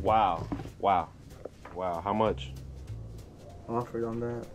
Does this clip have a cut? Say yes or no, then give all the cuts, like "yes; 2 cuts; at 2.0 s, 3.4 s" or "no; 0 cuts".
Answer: yes; 1 cut; at 1.7 s